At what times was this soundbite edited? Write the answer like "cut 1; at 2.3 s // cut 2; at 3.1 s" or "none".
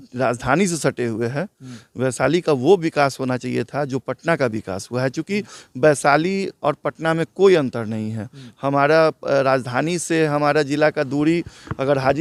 none